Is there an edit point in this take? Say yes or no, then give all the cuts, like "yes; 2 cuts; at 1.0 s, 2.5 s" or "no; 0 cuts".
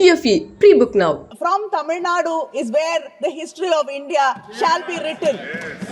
yes; 1 cut; at 1.3 s